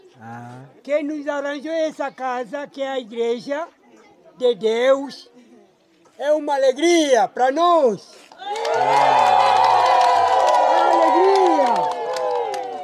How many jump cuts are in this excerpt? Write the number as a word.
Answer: zero